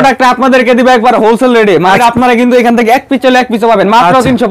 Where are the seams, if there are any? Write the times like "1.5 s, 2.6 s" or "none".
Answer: 2.0 s